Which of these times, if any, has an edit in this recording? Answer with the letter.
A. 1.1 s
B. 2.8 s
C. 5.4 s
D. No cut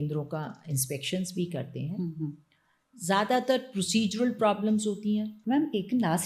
C